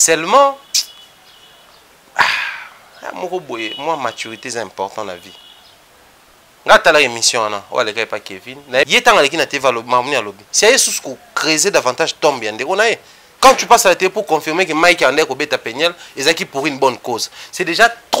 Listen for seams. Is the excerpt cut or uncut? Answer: cut